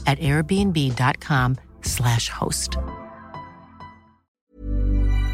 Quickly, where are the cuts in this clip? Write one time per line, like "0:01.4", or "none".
0:04.3